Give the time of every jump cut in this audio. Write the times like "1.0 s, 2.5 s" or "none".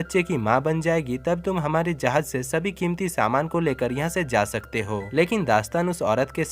5.0 s